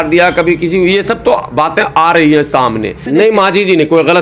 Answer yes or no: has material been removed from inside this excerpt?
yes